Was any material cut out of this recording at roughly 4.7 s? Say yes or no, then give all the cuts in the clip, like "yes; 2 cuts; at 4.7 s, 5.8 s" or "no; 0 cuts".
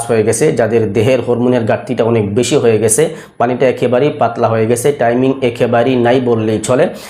no; 0 cuts